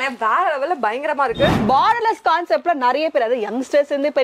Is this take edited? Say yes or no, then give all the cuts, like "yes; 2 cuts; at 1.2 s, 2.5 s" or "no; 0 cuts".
yes; 1 cut; at 1.6 s